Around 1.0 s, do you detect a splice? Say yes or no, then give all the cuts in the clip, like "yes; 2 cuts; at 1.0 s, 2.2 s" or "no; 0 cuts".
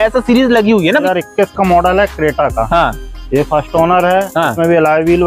yes; 1 cut; at 1.0 s